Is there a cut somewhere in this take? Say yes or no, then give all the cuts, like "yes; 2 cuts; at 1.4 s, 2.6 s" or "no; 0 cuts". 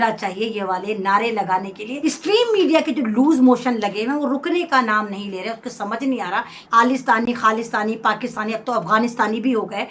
yes; 2 cuts; at 1.9 s, 6.6 s